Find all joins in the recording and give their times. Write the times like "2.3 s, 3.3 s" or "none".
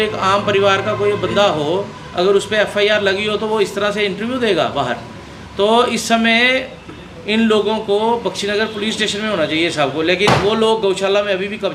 none